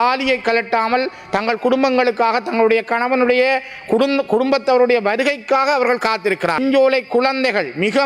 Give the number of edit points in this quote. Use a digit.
1